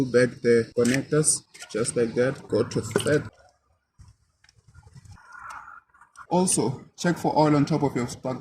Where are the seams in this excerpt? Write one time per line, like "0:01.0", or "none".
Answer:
0:02.4
0:03.3